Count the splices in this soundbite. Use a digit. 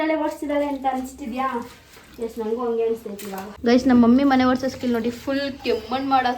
1